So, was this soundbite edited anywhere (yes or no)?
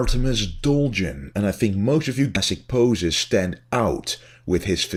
no